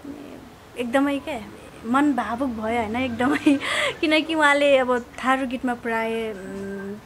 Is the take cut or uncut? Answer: uncut